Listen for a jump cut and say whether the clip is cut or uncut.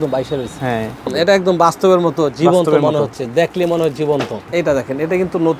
cut